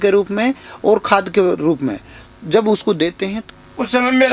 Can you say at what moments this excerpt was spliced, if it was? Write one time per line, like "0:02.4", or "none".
0:03.4